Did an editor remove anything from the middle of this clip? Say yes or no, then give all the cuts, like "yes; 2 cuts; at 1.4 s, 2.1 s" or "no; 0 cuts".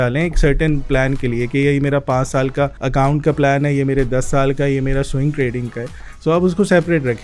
yes; 1 cut; at 2.8 s